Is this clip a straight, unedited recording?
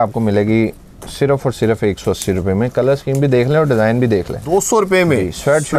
no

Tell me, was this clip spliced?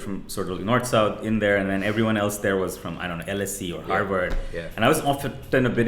no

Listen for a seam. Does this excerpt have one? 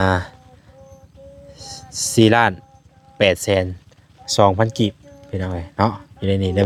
no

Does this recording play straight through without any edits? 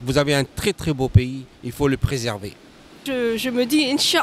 no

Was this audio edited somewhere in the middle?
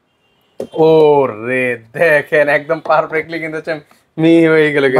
no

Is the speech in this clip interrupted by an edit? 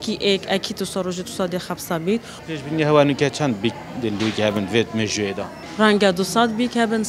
yes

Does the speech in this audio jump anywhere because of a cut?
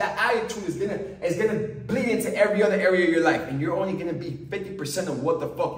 no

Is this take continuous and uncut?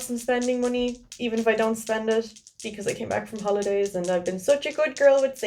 yes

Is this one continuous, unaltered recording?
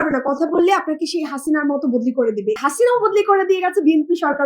no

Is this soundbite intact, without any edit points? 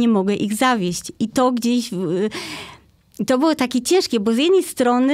yes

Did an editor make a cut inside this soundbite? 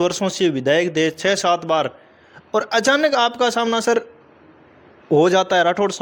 no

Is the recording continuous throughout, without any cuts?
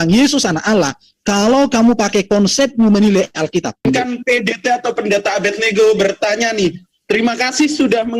no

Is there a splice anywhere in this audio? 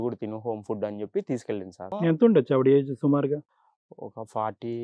yes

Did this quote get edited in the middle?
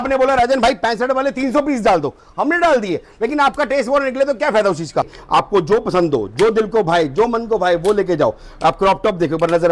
yes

